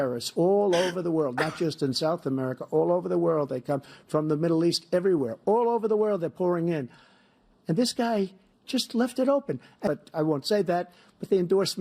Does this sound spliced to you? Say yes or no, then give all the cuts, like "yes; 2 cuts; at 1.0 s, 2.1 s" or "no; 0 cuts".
yes; 1 cut; at 9.8 s